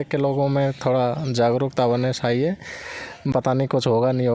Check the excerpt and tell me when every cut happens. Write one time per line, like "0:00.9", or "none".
0:03.3